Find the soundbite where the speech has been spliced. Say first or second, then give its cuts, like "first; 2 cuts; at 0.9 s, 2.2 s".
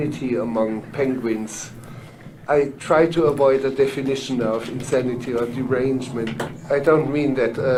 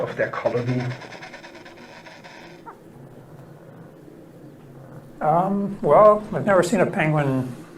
second; 1 cut; at 6.3 s